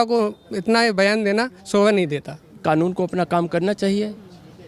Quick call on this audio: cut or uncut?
cut